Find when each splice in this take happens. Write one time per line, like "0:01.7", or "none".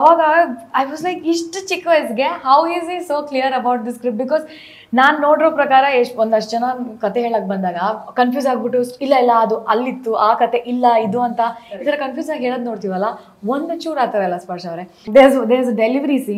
0:15.0